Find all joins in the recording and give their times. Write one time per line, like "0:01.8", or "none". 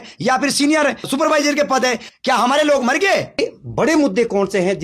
0:01.1
0:02.1
0:03.4